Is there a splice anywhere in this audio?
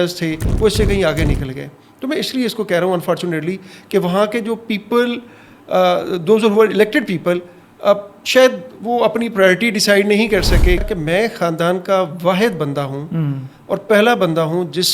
yes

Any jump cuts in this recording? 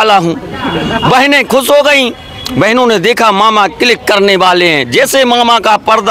no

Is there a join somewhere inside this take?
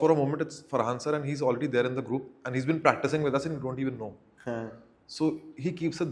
no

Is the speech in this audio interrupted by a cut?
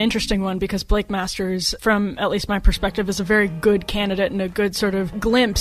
no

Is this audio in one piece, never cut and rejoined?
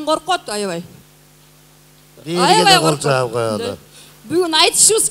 no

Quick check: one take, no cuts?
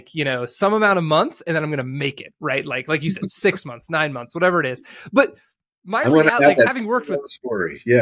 yes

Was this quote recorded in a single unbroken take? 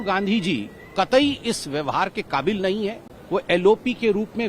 no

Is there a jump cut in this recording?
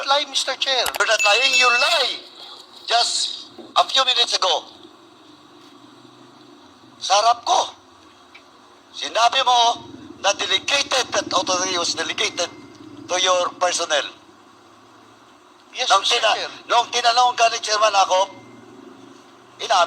yes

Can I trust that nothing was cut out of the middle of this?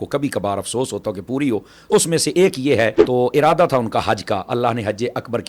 no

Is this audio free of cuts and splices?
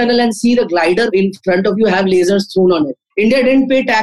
no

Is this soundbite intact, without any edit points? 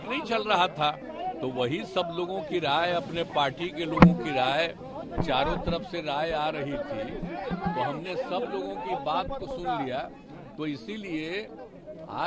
no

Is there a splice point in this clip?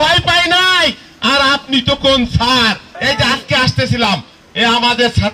no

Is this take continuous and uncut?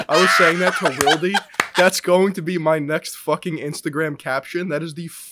yes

